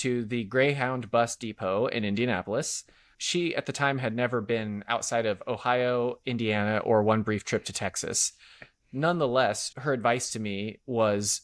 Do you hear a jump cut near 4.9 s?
no; 2 cuts; at 3.2 s, 9.7 s

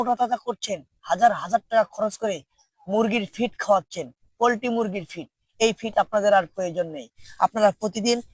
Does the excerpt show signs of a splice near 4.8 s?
no; 0 cuts

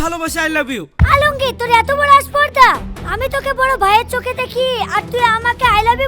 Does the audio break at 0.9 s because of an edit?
yes; 1 cut; at 0.9 s

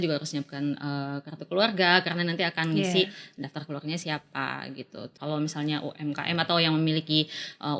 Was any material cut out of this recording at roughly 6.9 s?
no; 1 cut; at 5.2 s

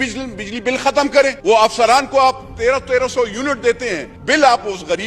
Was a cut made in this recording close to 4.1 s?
yes; 2 cuts; at 1.4 s, 4.1 s

